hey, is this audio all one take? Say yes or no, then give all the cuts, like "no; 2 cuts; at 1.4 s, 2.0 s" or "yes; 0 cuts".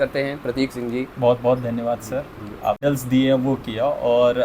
no; 1 cut; at 2.8 s